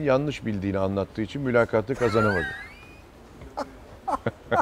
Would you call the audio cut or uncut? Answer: uncut